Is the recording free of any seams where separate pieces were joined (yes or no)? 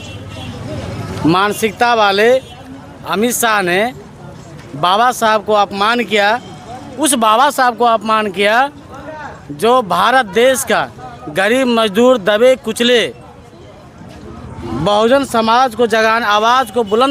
yes